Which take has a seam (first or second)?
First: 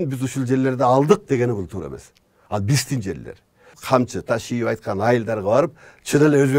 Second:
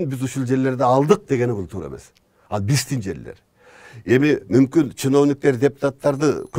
first